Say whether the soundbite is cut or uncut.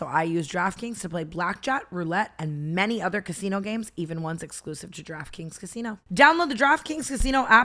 uncut